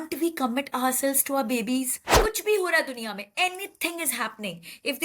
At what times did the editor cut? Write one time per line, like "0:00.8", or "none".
0:02.0